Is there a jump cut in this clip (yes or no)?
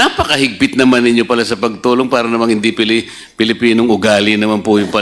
no